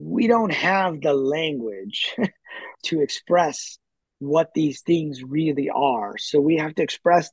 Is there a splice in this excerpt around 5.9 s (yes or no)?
no